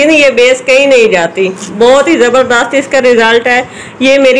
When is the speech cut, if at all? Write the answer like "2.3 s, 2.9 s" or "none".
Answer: none